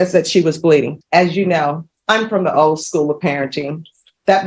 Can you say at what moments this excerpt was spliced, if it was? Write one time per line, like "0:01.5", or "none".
0:00.9
0:01.9